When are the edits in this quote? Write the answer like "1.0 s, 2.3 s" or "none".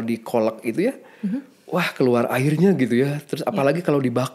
none